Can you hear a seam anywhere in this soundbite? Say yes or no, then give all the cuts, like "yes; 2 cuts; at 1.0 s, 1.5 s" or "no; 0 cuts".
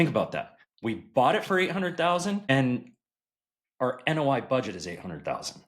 yes; 1 cut; at 2.5 s